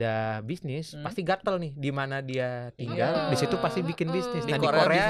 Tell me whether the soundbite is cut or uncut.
uncut